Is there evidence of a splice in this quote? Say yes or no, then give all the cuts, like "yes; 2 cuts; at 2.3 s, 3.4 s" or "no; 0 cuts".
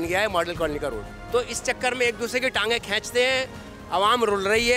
yes; 1 cut; at 1.1 s